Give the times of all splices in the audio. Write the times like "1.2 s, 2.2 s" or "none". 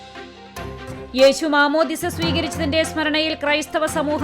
1.1 s